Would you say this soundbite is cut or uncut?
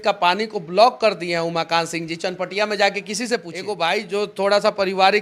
cut